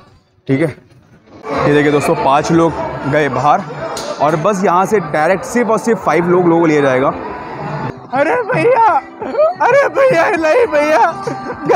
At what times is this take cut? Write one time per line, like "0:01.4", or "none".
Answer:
0:01.5
0:07.8